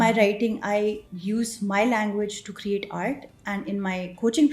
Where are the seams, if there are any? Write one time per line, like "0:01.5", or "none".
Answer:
0:01.1